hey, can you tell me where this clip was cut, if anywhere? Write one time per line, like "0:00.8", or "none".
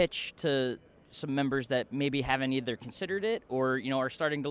none